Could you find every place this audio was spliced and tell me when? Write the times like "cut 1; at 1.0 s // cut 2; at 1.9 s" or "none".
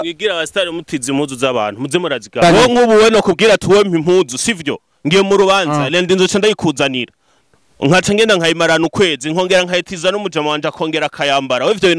cut 1; at 2.4 s